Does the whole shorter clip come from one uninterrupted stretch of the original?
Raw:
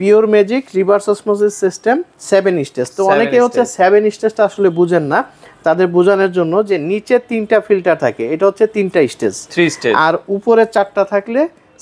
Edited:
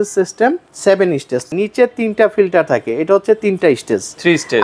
no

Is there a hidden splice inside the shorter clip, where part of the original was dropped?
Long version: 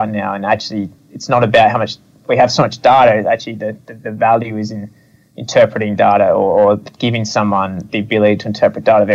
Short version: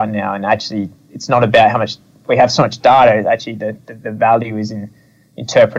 no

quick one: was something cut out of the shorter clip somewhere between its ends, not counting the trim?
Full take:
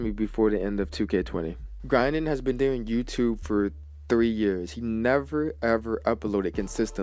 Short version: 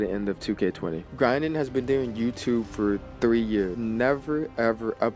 yes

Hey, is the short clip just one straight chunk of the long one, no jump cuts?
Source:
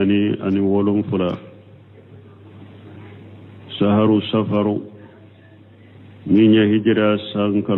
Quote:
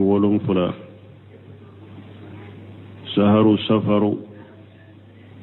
yes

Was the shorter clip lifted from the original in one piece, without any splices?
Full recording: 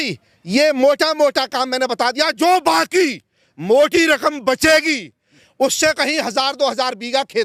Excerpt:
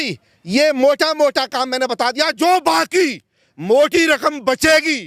yes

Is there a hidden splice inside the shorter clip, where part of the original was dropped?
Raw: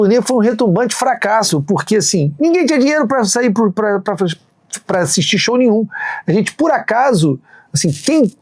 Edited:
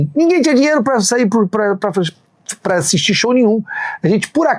no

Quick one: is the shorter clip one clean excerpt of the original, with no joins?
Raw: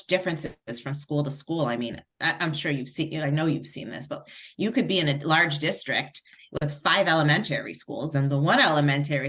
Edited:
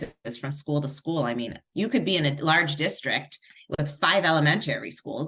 no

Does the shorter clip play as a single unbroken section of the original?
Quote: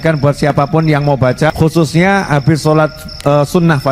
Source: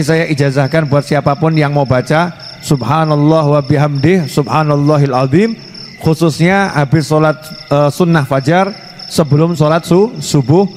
no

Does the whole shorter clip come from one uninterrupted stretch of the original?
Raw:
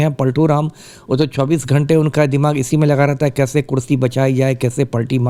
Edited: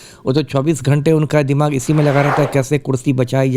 yes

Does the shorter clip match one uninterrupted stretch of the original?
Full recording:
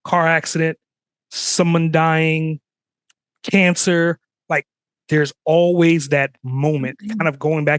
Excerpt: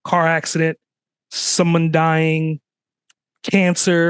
yes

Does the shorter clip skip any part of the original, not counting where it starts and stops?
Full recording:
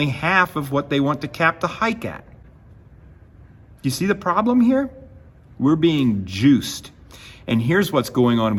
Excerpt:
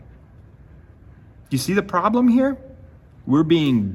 no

